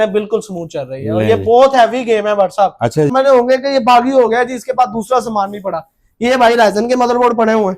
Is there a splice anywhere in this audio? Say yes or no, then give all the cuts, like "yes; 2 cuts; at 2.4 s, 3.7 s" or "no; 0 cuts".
yes; 1 cut; at 3.1 s